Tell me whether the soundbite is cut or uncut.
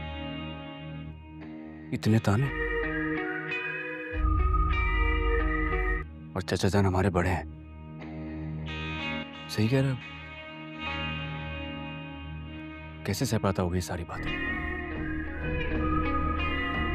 cut